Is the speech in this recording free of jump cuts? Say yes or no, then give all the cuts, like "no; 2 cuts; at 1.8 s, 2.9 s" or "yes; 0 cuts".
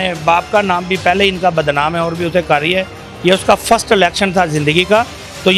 yes; 0 cuts